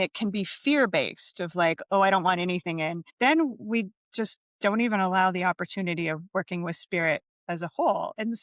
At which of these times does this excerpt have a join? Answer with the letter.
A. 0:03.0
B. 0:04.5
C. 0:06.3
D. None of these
A